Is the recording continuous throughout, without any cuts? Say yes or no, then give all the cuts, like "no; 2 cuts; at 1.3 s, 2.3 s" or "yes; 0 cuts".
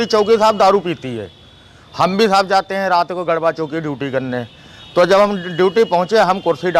yes; 0 cuts